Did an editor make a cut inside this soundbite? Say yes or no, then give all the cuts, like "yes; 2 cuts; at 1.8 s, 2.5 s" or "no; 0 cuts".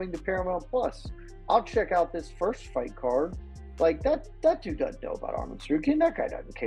no; 0 cuts